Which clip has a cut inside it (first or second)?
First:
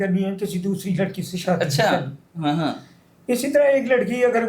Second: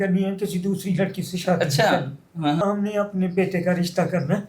second